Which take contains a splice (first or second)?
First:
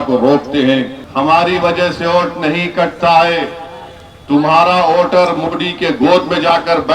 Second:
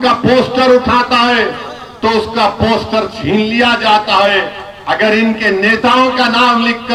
first